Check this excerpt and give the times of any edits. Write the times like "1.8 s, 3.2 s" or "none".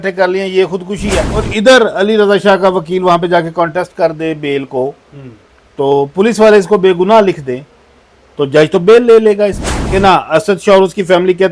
1.5 s, 9.9 s